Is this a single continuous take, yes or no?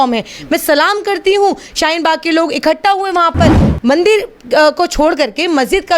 no